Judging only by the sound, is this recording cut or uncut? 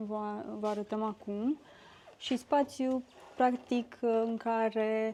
uncut